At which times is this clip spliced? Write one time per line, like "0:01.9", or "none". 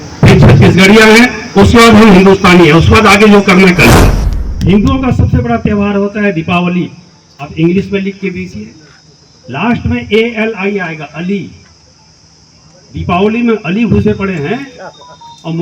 0:03.9